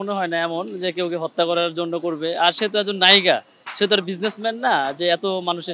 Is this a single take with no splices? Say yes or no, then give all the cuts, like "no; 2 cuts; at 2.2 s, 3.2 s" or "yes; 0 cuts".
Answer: yes; 0 cuts